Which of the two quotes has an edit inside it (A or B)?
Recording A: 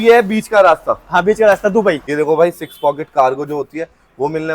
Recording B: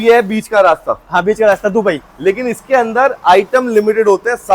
A